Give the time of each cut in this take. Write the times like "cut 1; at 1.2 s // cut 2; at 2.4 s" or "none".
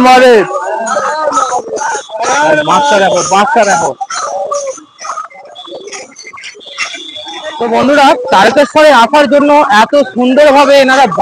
cut 1; at 7.4 s

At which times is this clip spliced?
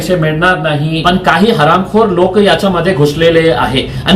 cut 1; at 1.0 s

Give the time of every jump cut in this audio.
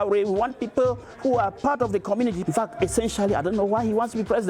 cut 1; at 2.4 s

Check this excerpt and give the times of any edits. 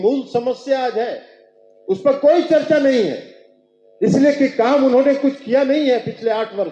none

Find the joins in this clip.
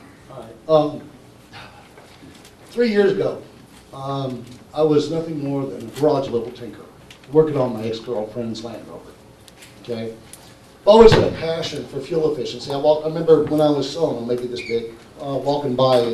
cut 1; at 1.2 s

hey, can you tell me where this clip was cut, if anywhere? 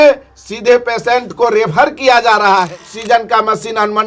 cut 1; at 2.9 s

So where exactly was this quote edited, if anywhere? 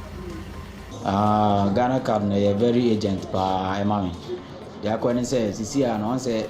cut 1; at 0.9 s

